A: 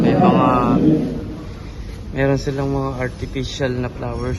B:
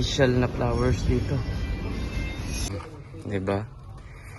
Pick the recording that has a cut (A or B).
B